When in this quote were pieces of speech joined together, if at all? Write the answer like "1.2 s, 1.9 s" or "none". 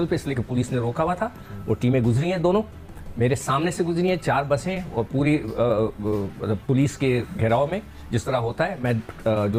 none